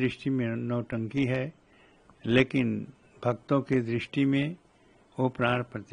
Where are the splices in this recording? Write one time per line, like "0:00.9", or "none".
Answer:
none